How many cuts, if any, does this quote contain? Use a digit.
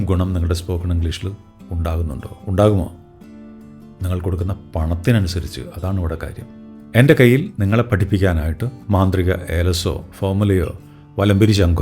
1